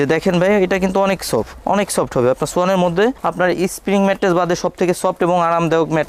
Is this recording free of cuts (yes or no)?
yes